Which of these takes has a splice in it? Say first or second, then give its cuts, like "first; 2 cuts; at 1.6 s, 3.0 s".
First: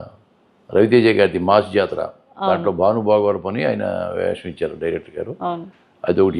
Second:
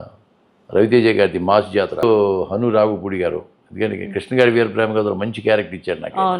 second; 1 cut; at 2.0 s